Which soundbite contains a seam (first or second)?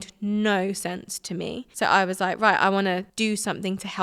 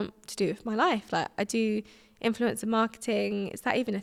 first